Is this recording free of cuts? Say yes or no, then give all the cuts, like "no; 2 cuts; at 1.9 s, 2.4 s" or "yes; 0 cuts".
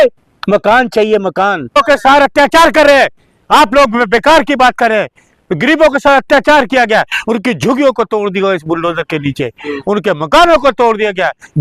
no; 1 cut; at 1.8 s